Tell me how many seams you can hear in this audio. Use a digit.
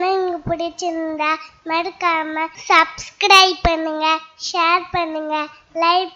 1